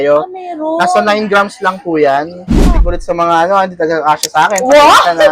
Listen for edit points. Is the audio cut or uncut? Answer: cut